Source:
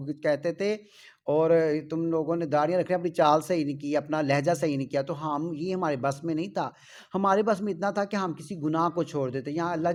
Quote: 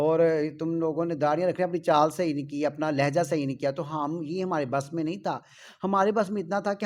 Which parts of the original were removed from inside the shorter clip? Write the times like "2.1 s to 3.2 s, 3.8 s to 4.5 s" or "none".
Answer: none

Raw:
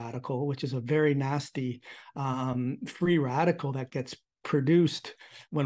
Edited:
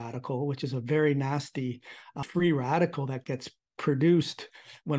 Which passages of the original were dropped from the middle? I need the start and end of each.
2.2 s to 2.8 s

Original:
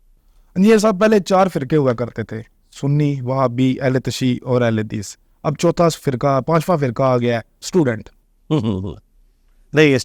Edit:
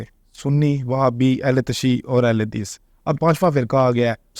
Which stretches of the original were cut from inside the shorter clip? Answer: 5.6 s to 6.4 s

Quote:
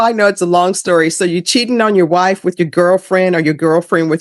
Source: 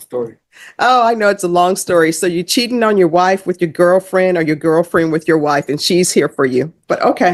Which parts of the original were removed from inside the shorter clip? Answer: none

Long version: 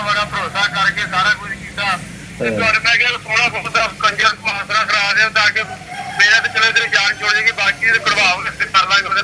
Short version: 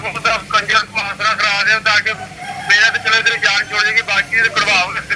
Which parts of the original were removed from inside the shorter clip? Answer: none

